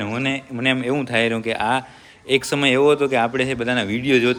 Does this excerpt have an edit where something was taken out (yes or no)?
no